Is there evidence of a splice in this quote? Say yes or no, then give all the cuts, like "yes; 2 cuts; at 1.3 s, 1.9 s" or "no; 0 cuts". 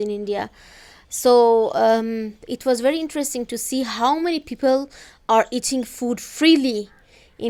no; 0 cuts